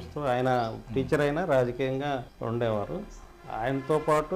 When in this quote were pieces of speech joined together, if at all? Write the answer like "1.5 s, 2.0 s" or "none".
2.3 s